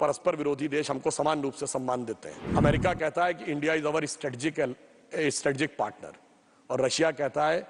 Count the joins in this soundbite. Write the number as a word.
one